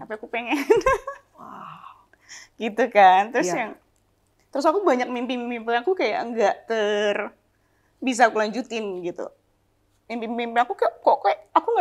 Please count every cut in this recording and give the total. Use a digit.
0